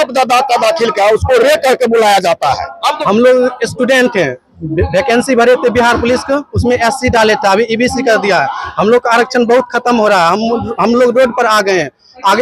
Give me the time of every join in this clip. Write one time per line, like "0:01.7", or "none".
0:03.0